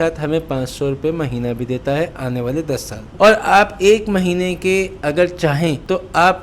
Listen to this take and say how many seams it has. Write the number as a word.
one